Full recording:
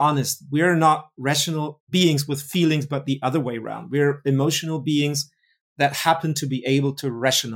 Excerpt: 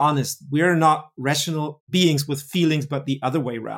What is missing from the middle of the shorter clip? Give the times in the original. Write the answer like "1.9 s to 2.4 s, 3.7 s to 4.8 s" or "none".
none